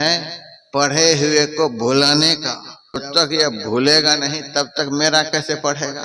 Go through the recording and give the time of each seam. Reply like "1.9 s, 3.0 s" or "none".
3.1 s